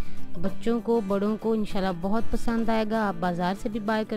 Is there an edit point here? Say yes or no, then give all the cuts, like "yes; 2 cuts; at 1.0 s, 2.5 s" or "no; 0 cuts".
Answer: no; 0 cuts